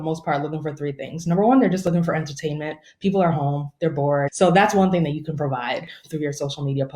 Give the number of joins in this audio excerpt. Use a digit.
1